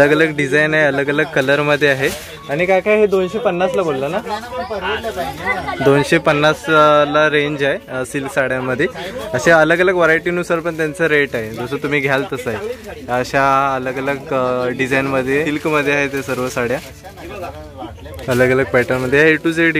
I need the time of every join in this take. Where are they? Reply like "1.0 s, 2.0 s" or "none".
none